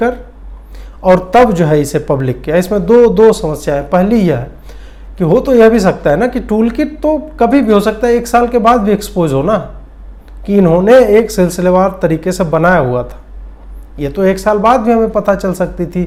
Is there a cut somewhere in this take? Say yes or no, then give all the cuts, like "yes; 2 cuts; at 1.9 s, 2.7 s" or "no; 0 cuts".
no; 0 cuts